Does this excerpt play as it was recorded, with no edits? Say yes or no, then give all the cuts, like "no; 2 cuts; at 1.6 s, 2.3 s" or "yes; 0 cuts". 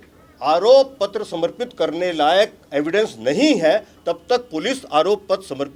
yes; 0 cuts